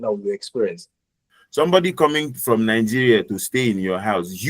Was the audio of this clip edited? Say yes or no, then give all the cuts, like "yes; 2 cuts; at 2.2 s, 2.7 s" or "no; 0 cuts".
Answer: yes; 1 cut; at 1.3 s